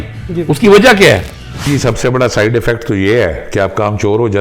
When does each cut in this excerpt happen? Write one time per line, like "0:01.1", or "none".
0:01.6